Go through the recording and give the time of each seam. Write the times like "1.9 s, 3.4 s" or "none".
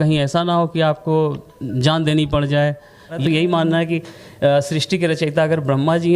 3.2 s